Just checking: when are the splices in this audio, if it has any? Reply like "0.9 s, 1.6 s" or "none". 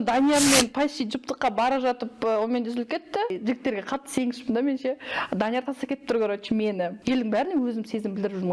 3.3 s, 6.9 s